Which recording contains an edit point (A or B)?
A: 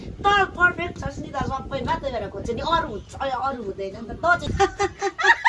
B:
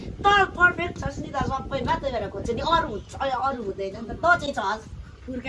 A